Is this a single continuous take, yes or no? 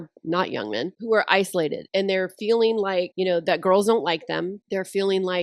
no